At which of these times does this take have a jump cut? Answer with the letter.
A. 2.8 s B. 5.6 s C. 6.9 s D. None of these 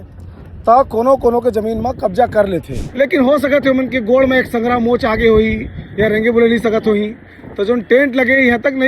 A